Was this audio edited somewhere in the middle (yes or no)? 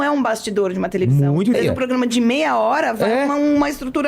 yes